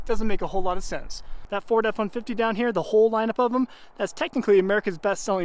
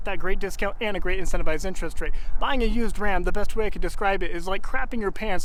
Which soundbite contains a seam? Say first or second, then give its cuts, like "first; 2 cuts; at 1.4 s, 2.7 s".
first; 1 cut; at 1.3 s